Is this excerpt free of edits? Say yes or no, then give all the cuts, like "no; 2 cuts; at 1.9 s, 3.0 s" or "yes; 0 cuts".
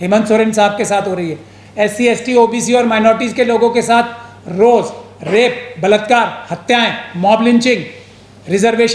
yes; 0 cuts